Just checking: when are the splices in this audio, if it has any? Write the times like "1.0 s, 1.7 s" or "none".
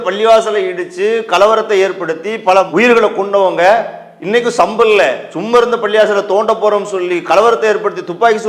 none